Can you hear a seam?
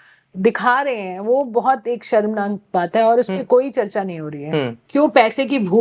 yes; 1 cut; at 4.8 s

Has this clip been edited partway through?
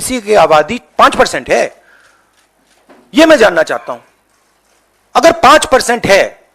no; 0 cuts

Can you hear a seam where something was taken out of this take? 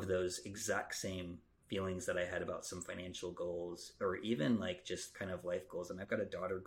no; 0 cuts

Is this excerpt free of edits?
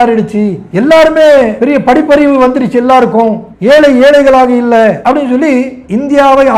yes; 0 cuts

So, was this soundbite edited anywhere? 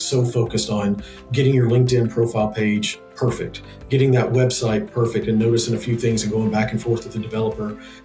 no; 0 cuts

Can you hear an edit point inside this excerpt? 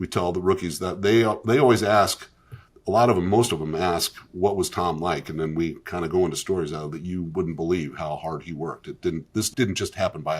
yes; 1 cut; at 9.5 s

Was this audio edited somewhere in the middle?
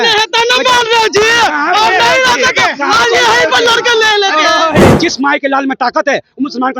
yes; 1 cut; at 4.9 s

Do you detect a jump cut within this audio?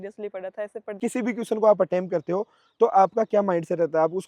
yes; 1 cut; at 1.0 s

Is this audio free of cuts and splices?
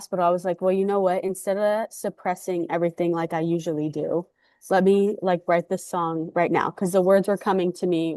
yes; 0 cuts

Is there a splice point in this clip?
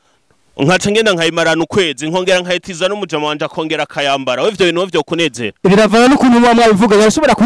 no; 0 cuts

